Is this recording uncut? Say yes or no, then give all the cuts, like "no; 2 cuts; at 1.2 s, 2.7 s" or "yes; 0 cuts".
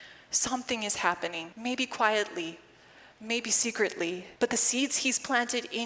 no; 2 cuts; at 1.5 s, 4.3 s